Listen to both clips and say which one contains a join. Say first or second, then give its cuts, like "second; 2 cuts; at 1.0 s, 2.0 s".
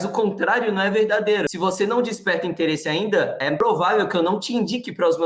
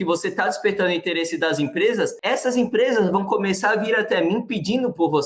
first; 1 cut; at 1.5 s